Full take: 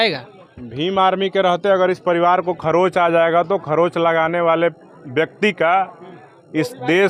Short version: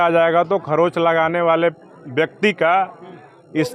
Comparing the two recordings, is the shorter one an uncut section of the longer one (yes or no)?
yes